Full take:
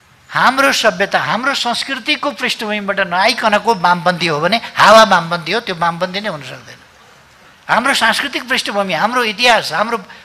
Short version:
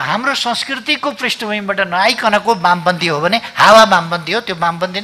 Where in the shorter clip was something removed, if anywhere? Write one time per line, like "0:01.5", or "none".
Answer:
none